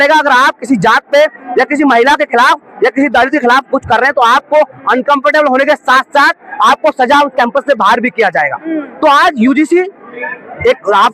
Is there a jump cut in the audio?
no; 0 cuts

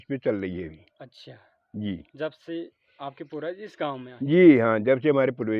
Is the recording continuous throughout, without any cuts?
yes; 0 cuts

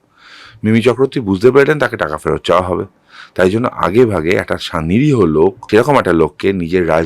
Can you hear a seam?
yes; 1 cut; at 5.6 s

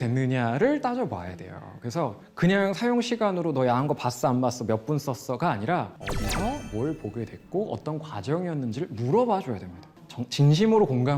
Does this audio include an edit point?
no; 0 cuts

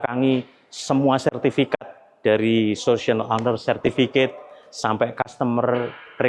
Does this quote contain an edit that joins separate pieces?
no; 0 cuts

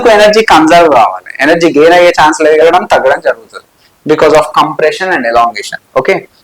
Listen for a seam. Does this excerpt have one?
yes; 1 cut; at 2.6 s

